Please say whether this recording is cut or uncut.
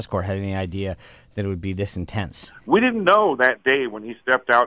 cut